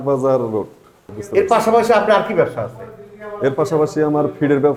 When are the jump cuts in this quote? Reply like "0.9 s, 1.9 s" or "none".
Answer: none